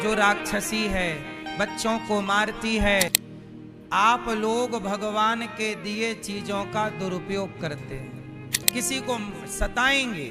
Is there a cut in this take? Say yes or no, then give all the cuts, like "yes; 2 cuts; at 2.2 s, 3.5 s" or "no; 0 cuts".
yes; 2 cuts; at 3.2 s, 8.6 s